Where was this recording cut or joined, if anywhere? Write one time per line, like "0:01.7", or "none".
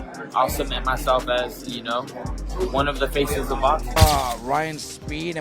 0:04.0